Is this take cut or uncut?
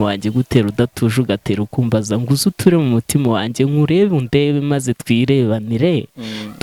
uncut